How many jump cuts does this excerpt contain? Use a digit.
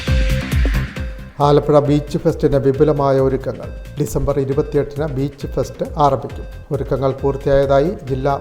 1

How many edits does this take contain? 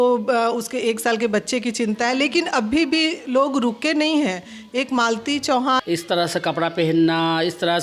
1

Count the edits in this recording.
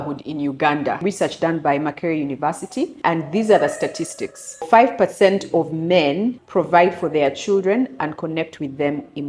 4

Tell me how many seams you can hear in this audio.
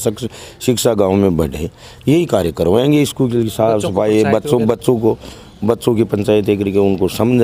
0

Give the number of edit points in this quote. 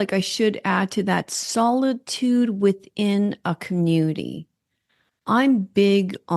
0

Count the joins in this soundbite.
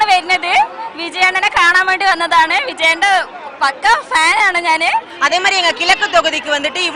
1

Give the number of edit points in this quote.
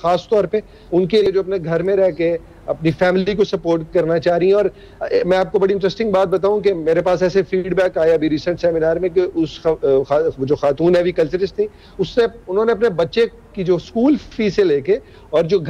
1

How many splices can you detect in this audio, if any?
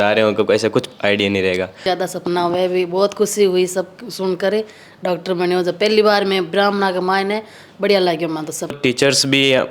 2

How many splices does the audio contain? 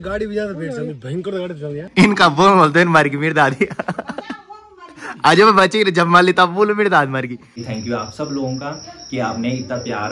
2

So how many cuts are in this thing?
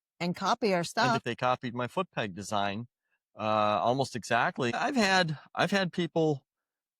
2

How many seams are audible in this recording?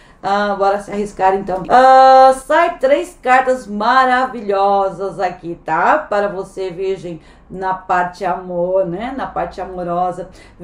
1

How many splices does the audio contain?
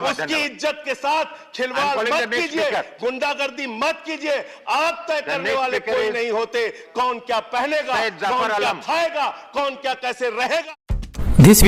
1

